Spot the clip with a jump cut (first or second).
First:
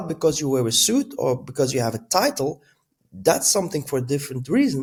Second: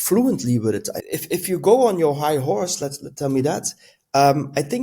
second